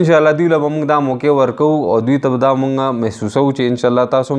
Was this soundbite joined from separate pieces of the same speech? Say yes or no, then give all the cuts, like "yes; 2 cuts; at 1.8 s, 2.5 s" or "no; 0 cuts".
no; 0 cuts